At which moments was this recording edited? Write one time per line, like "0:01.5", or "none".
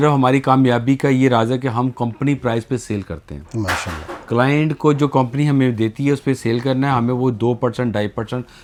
none